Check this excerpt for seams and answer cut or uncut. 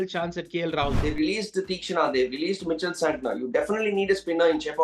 cut